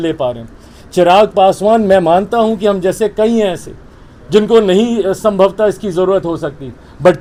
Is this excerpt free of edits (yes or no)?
yes